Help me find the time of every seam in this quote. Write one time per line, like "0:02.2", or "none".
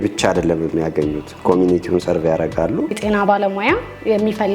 0:03.0